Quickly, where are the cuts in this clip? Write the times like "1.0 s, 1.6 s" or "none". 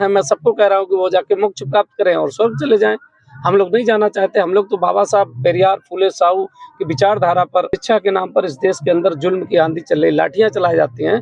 7.8 s